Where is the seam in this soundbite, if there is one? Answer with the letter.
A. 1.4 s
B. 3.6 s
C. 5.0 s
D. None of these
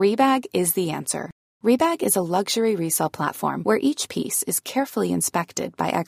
D